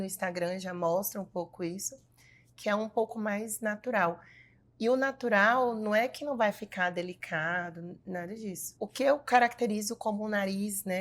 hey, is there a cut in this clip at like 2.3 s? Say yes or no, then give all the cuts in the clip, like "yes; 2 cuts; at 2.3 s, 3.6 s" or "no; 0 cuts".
no; 1 cut; at 8.7 s